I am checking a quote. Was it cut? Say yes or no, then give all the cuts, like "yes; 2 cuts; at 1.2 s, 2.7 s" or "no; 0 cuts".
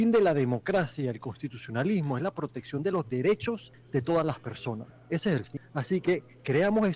yes; 3 cuts; at 3.7 s, 4.9 s, 5.6 s